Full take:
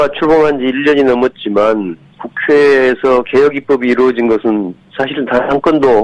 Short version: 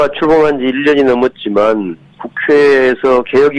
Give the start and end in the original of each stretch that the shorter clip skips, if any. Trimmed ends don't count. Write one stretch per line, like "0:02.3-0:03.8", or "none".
none